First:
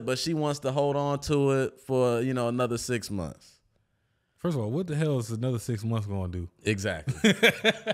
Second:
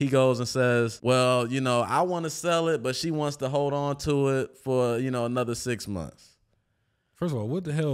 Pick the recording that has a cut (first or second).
second